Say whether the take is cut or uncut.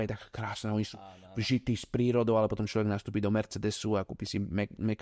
uncut